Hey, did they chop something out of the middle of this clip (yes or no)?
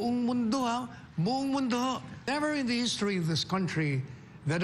yes